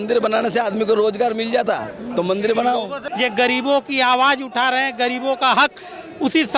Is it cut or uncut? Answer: cut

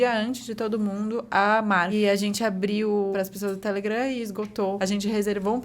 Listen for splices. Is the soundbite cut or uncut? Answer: cut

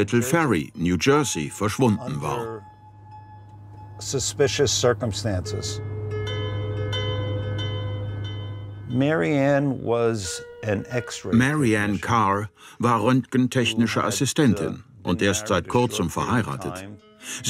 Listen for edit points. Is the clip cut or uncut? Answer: uncut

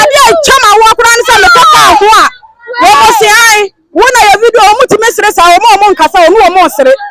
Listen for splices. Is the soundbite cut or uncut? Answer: uncut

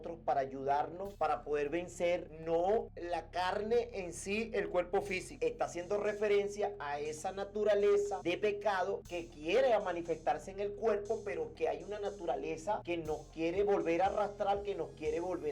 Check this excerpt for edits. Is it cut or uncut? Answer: cut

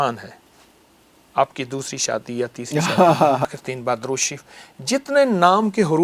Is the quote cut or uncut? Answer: cut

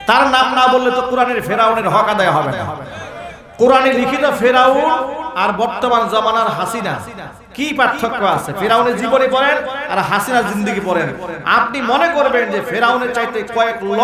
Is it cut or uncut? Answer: uncut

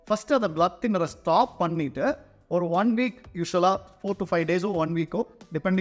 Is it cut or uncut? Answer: uncut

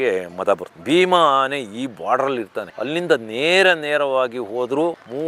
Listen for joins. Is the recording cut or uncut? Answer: cut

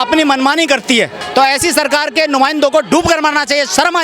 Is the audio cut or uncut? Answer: cut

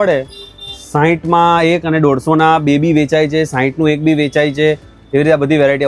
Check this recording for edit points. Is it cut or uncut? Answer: uncut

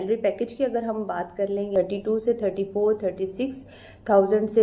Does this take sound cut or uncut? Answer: cut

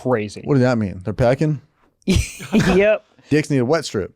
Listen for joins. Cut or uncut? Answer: cut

